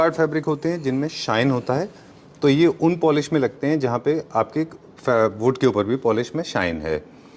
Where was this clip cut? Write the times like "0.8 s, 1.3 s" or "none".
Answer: none